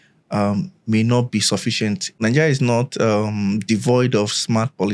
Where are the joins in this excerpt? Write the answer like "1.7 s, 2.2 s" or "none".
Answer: 2.2 s